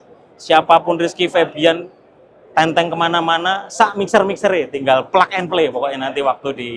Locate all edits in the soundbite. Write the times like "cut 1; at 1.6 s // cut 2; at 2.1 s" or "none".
none